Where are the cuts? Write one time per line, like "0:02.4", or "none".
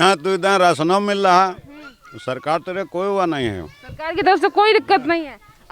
none